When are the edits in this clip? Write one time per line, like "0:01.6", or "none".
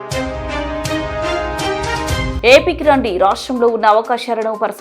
0:02.3